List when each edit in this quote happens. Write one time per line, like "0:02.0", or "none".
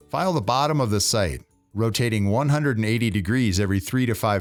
none